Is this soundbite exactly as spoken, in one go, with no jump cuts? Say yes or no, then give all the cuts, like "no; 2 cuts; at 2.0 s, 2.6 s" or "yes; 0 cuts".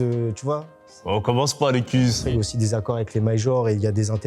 no; 1 cut; at 2.2 s